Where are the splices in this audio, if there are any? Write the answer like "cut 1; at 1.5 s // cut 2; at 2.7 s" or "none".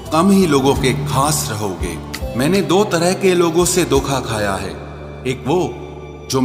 cut 1; at 2.1 s